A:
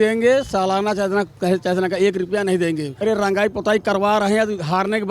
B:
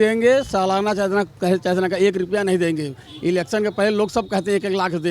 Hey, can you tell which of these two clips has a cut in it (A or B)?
A